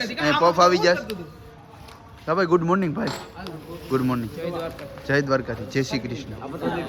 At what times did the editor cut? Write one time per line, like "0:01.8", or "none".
none